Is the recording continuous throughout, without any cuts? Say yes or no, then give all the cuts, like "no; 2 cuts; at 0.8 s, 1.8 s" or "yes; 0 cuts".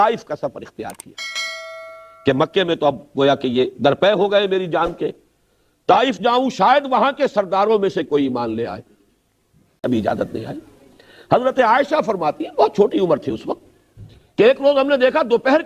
no; 1 cut; at 9.8 s